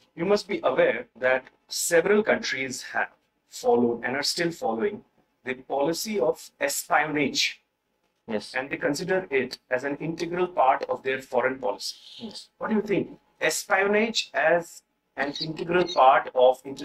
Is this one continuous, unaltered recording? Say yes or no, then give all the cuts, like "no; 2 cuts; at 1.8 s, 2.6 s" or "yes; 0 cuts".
yes; 0 cuts